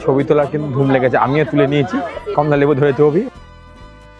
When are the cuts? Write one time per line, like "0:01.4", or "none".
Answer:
none